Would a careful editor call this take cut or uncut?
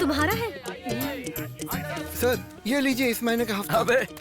cut